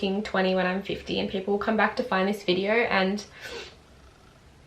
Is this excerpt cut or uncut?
uncut